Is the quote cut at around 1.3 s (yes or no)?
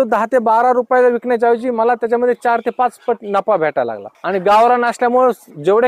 no